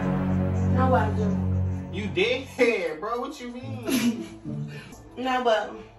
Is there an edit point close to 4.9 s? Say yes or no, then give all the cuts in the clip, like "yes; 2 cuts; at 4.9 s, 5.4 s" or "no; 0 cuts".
yes; 1 cut; at 4.9 s